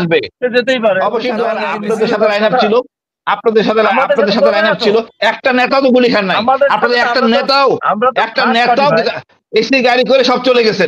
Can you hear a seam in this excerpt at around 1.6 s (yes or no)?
yes